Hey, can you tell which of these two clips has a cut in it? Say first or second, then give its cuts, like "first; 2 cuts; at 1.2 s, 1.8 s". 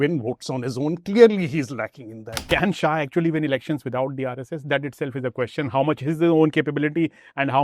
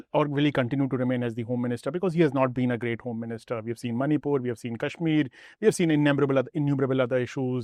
first; 1 cut; at 2.3 s